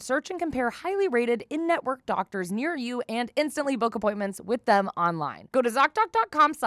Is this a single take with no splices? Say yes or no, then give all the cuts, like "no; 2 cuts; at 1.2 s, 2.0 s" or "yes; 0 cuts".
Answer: no; 1 cut; at 5.5 s